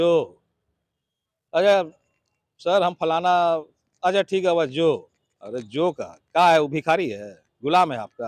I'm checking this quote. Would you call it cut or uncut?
uncut